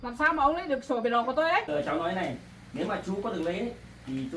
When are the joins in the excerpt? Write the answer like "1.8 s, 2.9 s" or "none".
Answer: 1.7 s

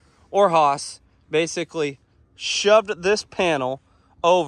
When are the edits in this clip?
none

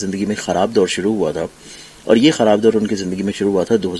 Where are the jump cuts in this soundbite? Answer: none

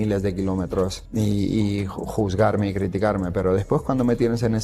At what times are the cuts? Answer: 1.0 s

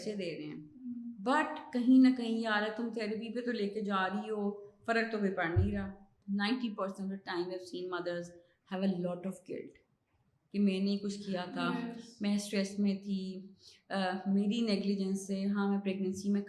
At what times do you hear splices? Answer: 6.2 s

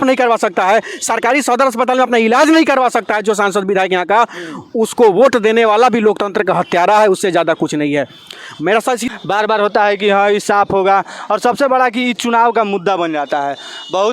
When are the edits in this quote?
9.0 s

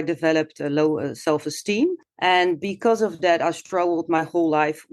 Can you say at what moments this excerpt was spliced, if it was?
2.1 s

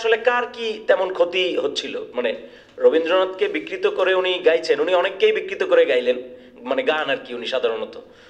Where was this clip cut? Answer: none

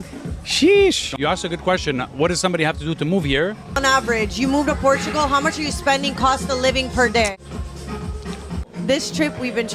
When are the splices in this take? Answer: 1.0 s, 3.8 s, 7.3 s, 8.6 s

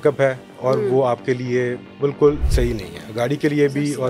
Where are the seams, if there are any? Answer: 2.5 s

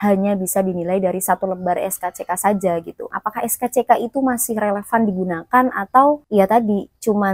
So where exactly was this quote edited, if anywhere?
3.2 s

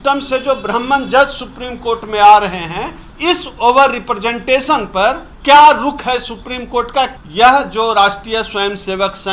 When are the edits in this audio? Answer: 3.0 s, 5.3 s, 7.1 s

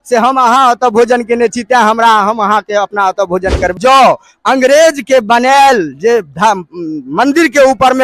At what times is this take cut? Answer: 3.8 s

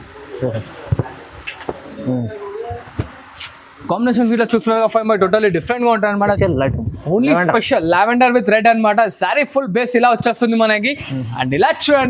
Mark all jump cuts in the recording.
6.4 s

